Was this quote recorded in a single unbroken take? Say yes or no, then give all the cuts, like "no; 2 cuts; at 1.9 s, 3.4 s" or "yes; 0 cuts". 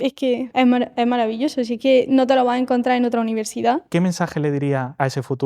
no; 1 cut; at 3.9 s